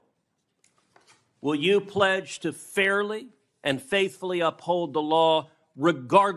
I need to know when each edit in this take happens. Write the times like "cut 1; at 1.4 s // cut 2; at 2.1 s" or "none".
none